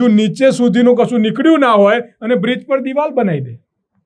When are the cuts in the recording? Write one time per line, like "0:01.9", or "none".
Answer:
none